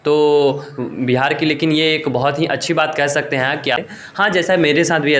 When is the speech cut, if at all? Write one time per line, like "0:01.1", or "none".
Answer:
0:03.8